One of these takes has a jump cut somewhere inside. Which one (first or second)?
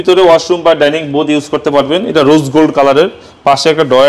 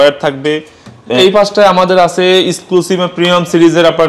second